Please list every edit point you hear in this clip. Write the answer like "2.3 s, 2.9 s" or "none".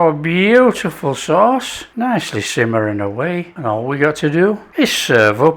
1.8 s, 3.5 s, 4.6 s